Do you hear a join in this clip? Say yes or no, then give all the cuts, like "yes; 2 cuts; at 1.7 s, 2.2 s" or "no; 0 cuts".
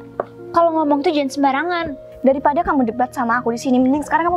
yes; 1 cut; at 2.1 s